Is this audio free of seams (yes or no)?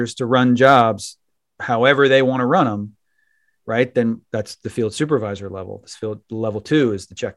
yes